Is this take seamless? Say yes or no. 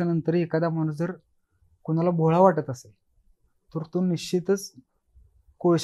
yes